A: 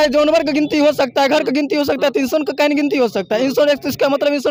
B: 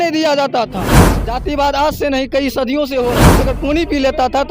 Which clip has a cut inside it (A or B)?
B